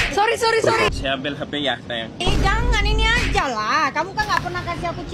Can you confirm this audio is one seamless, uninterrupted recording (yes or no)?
no